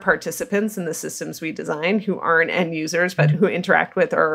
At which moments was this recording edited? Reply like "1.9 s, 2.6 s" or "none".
3.2 s